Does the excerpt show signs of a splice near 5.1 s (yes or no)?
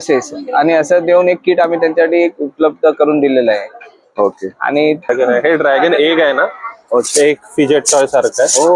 yes